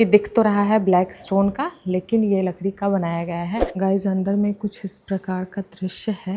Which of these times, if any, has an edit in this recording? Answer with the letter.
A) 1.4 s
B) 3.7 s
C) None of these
B